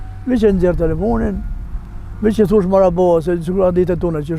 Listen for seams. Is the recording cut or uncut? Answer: uncut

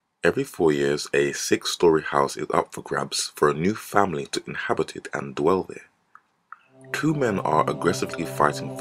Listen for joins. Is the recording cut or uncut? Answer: uncut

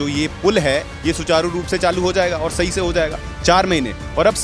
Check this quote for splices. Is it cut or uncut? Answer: uncut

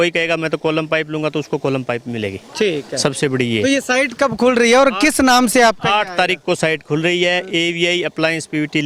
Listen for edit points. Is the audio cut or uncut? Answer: uncut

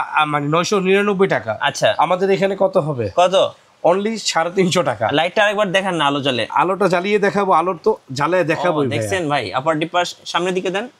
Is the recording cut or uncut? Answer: uncut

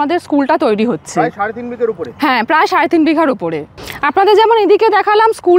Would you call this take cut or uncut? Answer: uncut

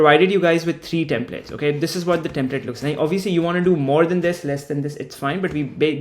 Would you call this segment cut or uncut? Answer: uncut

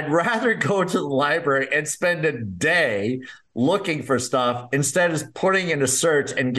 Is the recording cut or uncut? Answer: uncut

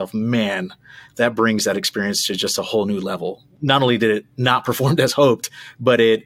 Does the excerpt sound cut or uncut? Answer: cut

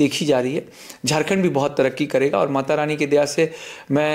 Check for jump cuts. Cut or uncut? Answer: uncut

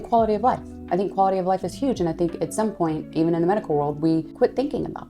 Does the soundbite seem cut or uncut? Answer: uncut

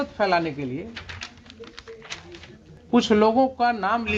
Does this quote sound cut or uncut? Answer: uncut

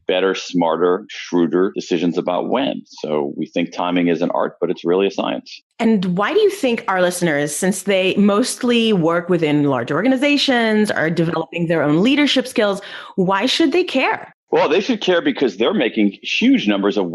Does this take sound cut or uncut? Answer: uncut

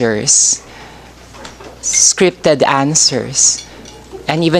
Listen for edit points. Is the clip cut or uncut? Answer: uncut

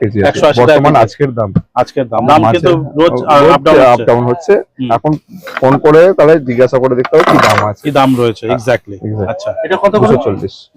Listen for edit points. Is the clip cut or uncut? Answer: uncut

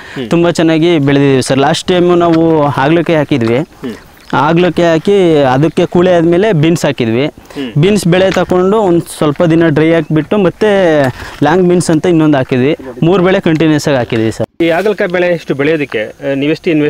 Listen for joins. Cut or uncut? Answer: cut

